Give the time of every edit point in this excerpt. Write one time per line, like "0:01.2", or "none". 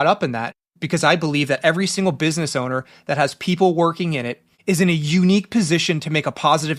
none